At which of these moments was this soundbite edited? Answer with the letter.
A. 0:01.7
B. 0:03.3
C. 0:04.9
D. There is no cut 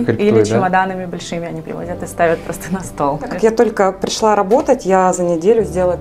B